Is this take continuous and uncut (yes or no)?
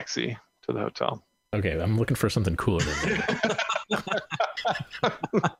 yes